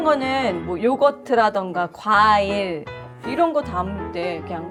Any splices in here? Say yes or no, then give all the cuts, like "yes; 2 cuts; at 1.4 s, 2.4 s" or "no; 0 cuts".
no; 0 cuts